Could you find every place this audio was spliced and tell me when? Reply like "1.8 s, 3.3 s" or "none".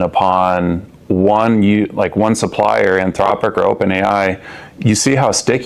none